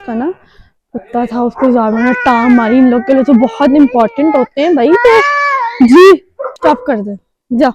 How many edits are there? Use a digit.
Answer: 1